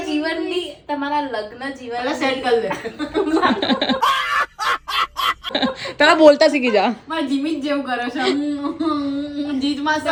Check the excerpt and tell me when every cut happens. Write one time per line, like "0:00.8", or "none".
none